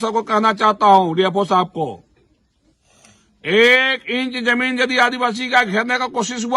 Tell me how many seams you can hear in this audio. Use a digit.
0